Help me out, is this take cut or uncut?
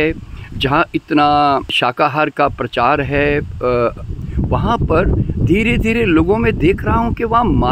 uncut